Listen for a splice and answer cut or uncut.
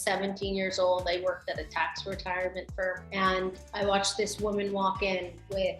cut